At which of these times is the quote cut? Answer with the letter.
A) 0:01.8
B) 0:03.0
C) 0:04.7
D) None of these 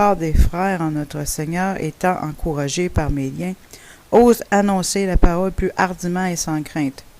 A